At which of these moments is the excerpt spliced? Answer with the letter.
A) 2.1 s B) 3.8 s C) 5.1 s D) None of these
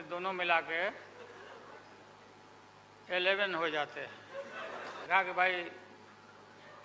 C